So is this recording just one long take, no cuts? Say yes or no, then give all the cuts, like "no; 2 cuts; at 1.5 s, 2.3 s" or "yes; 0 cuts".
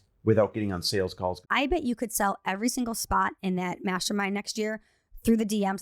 no; 1 cut; at 1.4 s